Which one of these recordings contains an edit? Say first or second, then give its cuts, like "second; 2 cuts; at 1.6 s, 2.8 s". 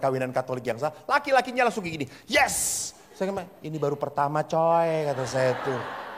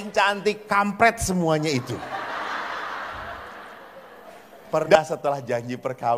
second; 1 cut; at 5.0 s